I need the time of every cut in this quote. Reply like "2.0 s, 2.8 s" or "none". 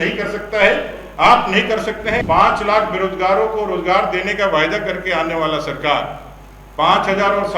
2.2 s

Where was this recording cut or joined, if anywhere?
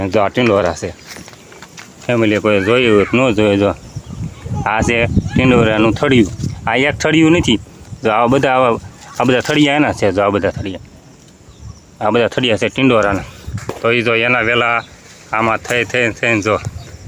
none

